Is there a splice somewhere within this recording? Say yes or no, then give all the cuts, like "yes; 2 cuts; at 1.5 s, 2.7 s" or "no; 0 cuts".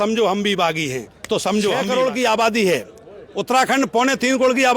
yes; 1 cut; at 1.8 s